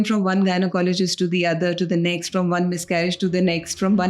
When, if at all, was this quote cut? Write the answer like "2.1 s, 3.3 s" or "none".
none

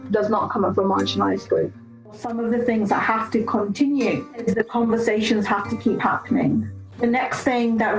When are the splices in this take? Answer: 2.2 s, 4.3 s, 6.8 s

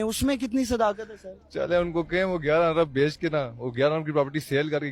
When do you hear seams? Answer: none

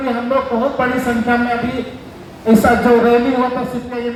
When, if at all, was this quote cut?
none

